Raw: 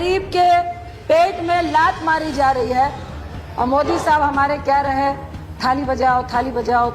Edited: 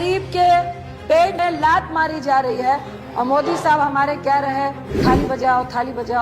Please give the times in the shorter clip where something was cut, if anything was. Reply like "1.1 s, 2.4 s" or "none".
1.3 s, 3.0 s, 4.9 s